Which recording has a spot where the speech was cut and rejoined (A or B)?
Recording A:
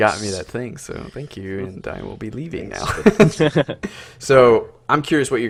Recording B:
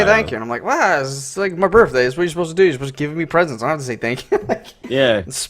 B